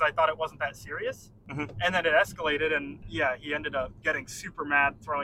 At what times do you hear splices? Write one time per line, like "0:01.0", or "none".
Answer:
0:01.3
0:03.0
0:04.0